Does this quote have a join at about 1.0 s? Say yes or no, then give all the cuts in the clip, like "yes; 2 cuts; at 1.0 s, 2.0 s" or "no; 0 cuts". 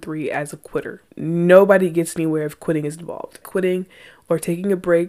yes; 2 cuts; at 1.0 s, 3.4 s